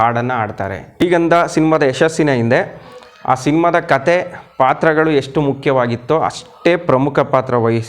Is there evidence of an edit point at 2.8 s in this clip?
no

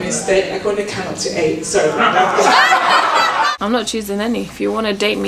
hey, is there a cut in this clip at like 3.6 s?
yes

